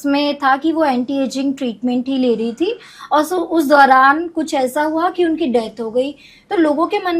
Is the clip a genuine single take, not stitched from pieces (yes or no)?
yes